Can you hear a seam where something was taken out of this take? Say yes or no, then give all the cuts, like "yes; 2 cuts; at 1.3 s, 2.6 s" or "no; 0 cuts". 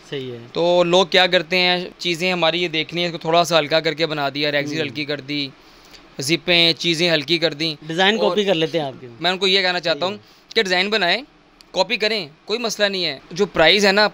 yes; 3 cuts; at 1.9 s, 9.1 s, 13.2 s